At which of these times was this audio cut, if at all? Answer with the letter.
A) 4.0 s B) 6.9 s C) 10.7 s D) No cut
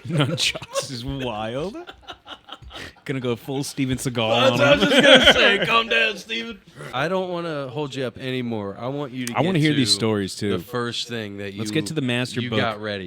B